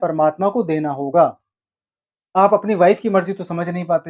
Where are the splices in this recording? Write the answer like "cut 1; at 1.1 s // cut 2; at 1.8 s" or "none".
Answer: none

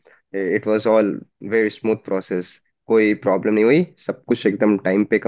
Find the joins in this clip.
none

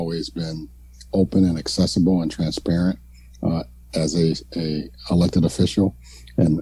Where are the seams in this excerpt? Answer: none

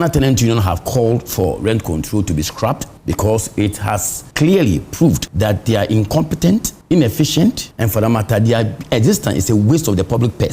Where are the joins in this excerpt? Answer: cut 1; at 2.9 s // cut 2; at 4.2 s // cut 3; at 5.3 s // cut 4; at 6.7 s // cut 5; at 7.7 s

